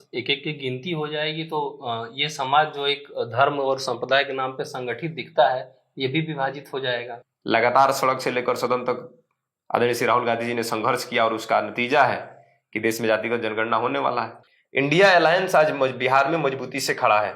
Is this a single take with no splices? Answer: no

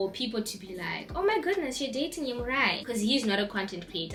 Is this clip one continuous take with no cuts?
yes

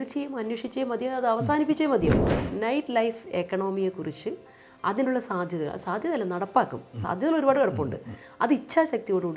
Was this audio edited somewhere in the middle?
yes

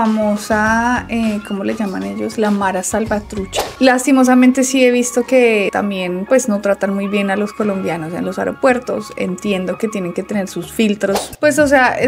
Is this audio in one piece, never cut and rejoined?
no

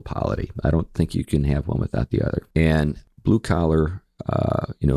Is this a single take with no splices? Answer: no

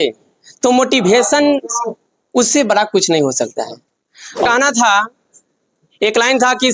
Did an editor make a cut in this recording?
yes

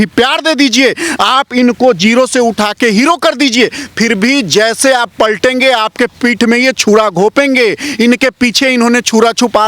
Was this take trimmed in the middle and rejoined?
no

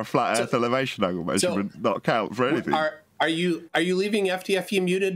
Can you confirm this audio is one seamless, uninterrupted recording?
yes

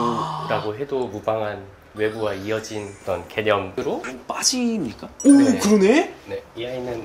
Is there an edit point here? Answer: yes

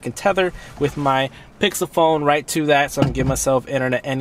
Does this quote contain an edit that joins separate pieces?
no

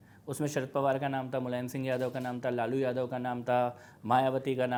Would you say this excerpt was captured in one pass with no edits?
yes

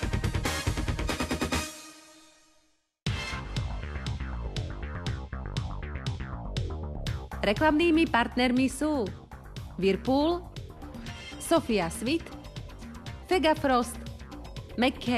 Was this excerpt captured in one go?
yes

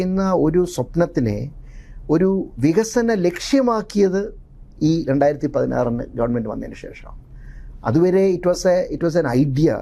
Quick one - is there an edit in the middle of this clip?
no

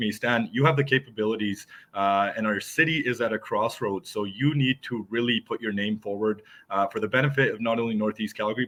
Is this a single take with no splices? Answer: yes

